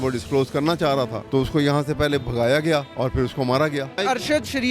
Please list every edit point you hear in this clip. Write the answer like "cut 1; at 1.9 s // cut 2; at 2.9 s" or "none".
cut 1; at 1.2 s // cut 2; at 2.9 s // cut 3; at 4.0 s

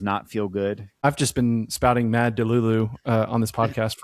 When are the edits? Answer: cut 1; at 1.0 s

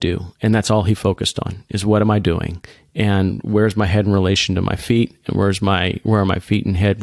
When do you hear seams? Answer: none

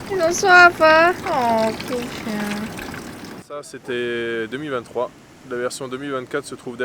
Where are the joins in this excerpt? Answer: cut 1; at 3.7 s

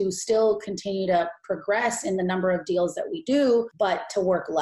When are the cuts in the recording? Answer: cut 1; at 3.7 s

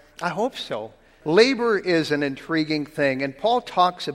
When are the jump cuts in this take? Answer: cut 1; at 1.1 s

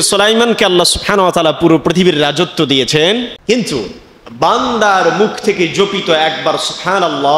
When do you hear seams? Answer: cut 1; at 3.3 s

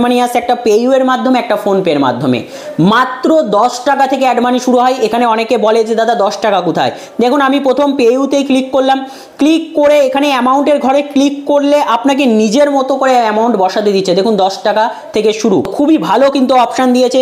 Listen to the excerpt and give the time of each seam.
cut 1; at 15.7 s

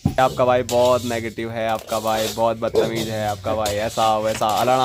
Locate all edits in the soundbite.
none

